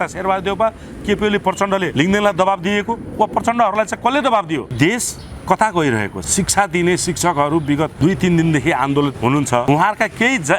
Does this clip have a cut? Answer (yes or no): yes